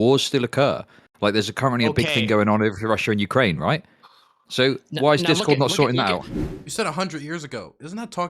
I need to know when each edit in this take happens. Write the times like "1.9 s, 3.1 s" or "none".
6.3 s